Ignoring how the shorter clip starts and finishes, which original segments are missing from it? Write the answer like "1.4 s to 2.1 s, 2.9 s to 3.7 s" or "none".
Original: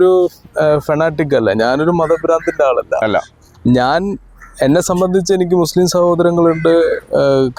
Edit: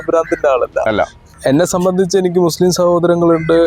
3.4 s to 4.4 s